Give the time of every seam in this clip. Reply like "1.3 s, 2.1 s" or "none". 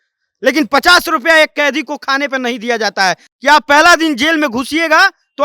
3.2 s